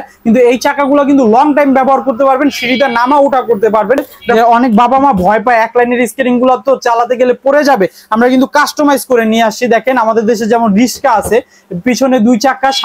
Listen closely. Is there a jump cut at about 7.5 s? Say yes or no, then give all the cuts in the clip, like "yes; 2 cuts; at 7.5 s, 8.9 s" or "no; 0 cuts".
no; 1 cut; at 4.2 s